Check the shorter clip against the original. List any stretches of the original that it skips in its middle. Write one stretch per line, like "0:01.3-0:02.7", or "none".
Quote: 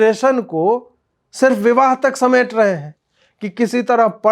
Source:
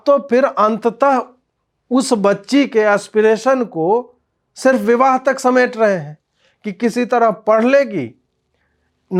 none